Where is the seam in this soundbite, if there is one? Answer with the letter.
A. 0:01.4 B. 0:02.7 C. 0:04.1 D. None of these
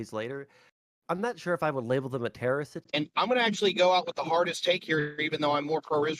B